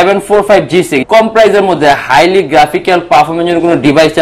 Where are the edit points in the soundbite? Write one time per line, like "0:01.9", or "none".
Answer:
0:01.0